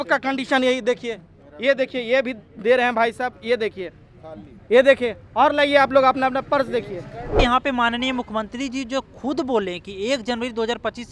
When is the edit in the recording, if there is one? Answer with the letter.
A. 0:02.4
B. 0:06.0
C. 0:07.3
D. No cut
C